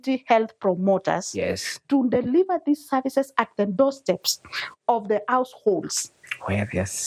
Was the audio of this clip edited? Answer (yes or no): no